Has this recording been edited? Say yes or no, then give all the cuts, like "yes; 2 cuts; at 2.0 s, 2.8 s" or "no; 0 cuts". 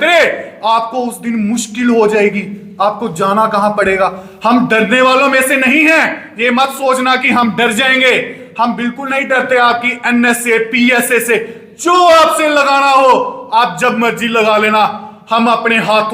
no; 0 cuts